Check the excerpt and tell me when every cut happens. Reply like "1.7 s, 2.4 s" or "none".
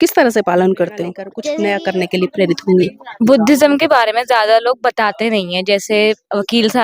1.3 s